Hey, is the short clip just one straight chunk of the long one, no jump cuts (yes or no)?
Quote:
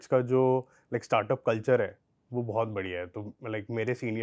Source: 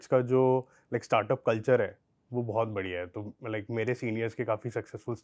yes